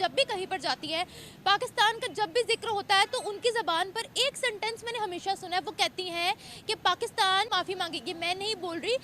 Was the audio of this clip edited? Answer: yes; 1 cut; at 7.5 s

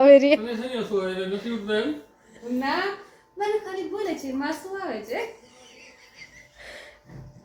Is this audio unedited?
yes; 0 cuts

